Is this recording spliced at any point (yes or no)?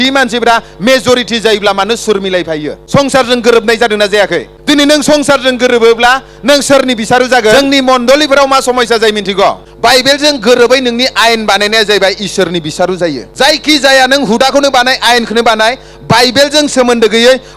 yes